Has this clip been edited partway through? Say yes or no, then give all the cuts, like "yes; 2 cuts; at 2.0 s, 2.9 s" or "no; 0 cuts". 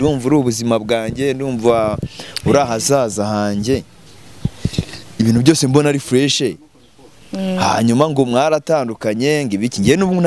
no; 0 cuts